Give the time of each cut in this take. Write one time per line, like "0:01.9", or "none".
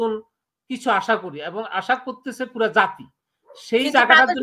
none